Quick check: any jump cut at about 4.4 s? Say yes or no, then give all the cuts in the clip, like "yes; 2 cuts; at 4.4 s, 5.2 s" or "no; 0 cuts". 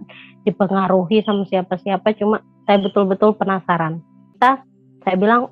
yes; 1 cut; at 4.4 s